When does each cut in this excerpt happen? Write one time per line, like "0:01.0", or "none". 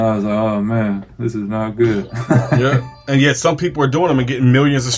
0:02.6

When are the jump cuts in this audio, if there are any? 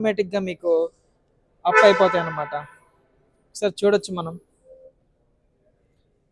none

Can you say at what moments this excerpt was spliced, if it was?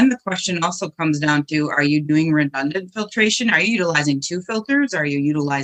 none

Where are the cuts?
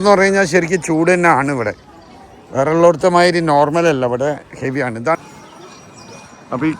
0:05.2

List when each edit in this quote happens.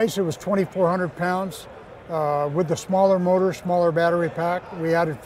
none

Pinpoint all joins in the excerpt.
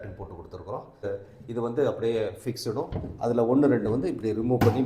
0:01.0

